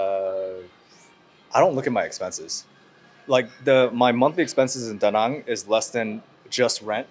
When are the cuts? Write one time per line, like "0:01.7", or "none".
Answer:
none